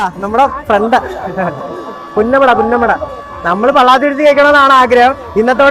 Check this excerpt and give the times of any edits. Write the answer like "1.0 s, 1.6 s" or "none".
none